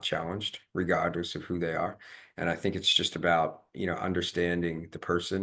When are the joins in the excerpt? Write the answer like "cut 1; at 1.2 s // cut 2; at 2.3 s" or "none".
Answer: none